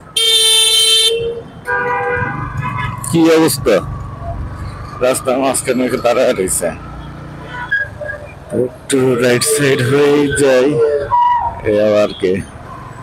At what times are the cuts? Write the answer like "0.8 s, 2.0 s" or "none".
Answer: 7.8 s